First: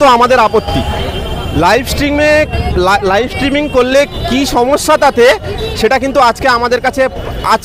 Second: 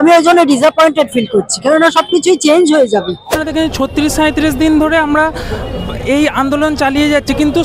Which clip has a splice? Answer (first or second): second